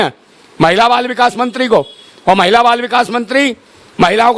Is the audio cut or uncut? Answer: uncut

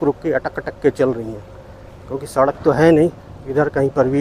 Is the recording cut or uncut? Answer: uncut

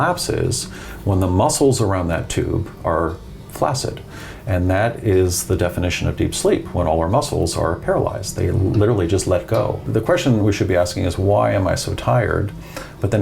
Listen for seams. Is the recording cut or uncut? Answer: cut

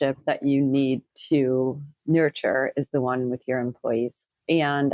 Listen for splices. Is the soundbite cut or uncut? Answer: cut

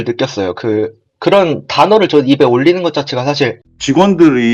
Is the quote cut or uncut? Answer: cut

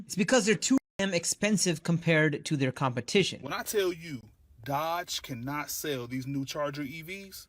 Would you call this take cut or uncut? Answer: cut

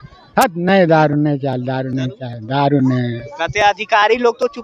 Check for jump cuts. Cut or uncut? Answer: uncut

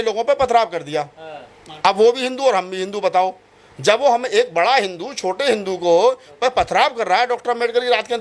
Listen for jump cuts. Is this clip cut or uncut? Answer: uncut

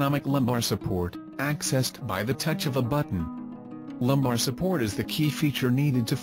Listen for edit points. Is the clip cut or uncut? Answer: uncut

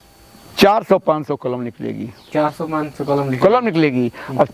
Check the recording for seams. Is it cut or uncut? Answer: uncut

